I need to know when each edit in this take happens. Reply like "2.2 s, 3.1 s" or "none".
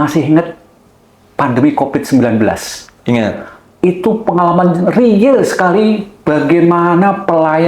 none